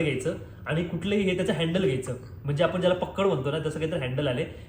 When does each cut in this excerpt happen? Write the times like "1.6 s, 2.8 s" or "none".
none